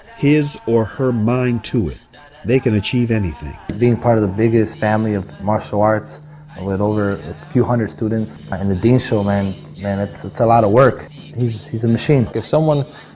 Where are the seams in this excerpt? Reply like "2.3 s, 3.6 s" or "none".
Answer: 3.7 s, 8.4 s, 12.3 s